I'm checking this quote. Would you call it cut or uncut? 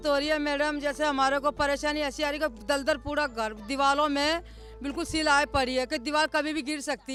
uncut